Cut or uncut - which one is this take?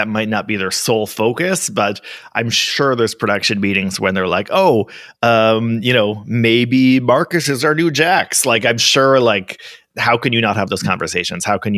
uncut